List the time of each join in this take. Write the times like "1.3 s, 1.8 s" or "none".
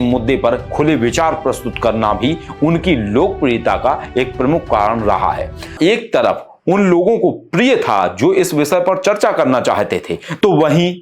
5.7 s